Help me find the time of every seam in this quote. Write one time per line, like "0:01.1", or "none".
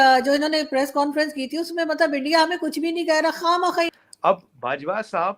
0:03.9